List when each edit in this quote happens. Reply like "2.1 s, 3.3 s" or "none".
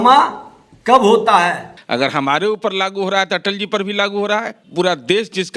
1.7 s, 4.6 s